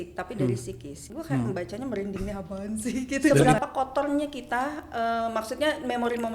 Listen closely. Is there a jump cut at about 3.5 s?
yes; 2 cuts; at 1.1 s, 3.5 s

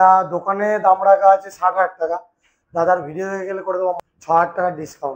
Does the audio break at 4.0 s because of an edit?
yes; 1 cut; at 4.0 s

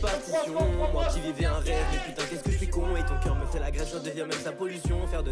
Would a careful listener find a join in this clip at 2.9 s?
no; 0 cuts

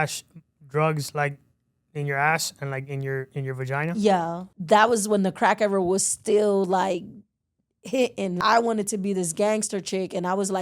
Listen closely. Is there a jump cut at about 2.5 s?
no; 2 cuts; at 4.5 s, 8.4 s

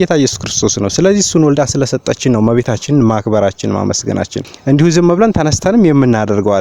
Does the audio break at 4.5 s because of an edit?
yes; 1 cut; at 4.5 s

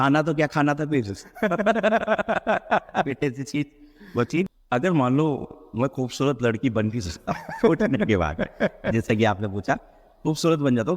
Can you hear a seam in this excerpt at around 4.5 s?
yes; 1 cut; at 4.5 s

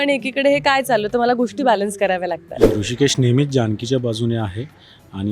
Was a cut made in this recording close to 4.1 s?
no; 1 cut; at 2.7 s

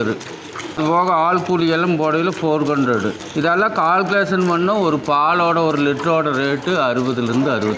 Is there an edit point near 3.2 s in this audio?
yes; 2 cuts; at 0.8 s, 3.2 s

